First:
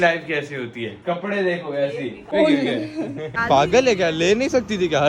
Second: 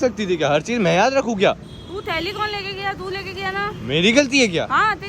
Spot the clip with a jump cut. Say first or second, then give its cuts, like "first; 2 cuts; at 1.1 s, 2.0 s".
first; 2 cuts; at 2.2 s, 3.3 s